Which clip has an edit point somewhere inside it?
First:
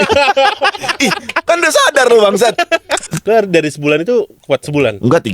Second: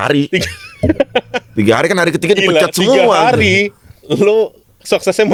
first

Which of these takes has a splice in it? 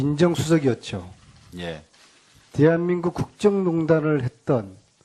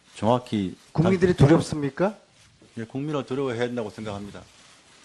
second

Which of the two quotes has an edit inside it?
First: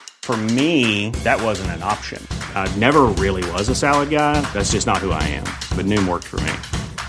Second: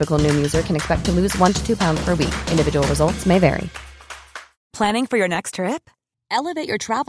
second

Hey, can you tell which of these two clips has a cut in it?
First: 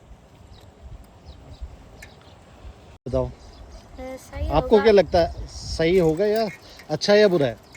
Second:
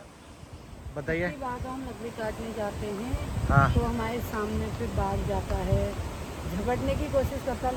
first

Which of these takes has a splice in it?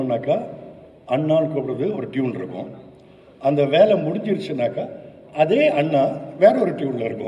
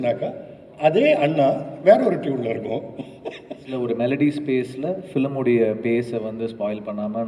second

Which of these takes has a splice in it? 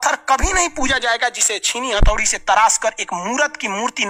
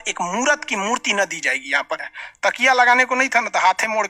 second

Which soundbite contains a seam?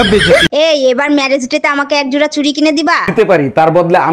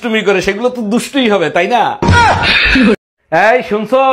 second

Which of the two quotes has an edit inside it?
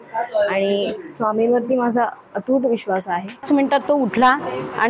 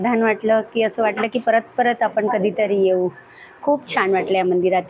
first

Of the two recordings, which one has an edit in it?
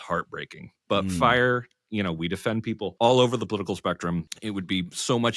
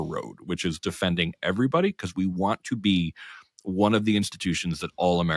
first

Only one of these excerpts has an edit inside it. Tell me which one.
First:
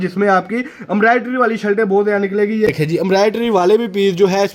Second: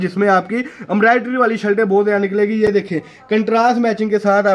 first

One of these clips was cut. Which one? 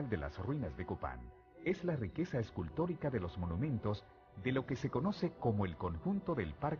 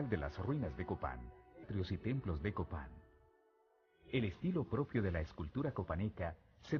first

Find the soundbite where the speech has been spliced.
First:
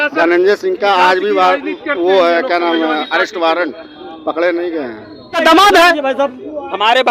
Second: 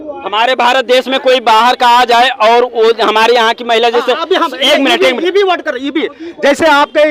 first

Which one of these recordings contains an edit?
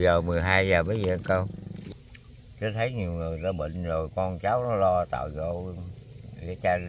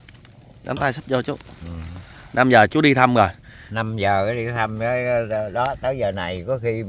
first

